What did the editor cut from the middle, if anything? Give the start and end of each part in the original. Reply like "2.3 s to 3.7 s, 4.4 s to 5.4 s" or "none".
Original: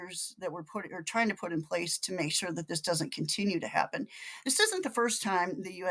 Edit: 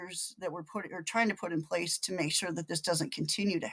none